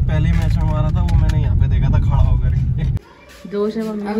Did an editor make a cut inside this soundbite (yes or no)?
yes